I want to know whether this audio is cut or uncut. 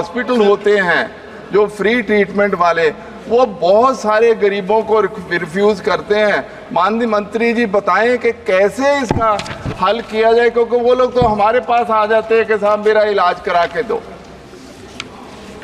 uncut